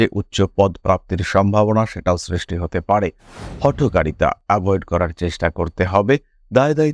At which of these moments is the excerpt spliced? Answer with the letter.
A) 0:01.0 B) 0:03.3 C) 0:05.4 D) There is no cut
B